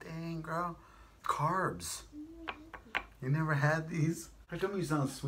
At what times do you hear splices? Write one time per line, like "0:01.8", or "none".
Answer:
0:04.4